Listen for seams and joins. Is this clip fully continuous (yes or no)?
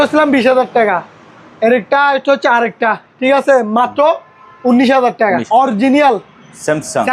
no